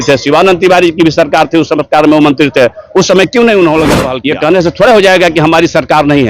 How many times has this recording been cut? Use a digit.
1